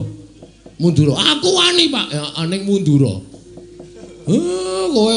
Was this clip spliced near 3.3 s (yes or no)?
no